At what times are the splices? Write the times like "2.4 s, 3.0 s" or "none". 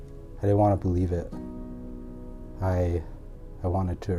none